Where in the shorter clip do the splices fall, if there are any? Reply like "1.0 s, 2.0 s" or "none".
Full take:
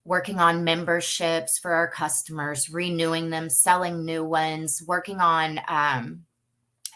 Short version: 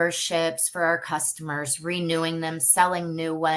none